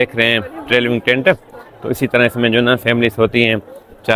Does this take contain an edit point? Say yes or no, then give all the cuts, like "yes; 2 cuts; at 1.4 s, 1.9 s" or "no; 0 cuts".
no; 0 cuts